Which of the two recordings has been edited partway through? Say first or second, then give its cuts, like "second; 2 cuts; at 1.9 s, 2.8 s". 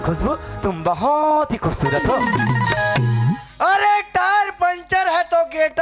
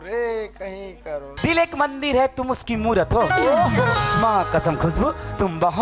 second; 1 cut; at 1.3 s